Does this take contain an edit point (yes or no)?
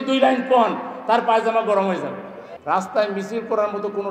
yes